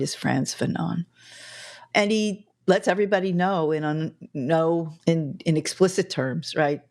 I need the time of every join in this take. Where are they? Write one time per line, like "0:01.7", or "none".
0:01.8
0:04.9